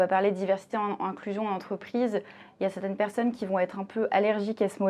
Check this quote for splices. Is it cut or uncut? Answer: uncut